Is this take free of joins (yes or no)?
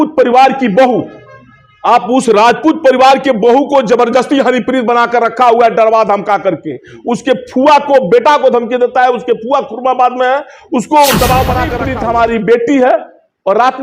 no